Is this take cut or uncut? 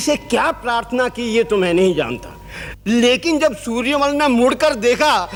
uncut